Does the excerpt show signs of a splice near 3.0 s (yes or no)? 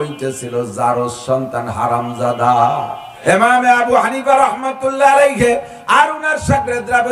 yes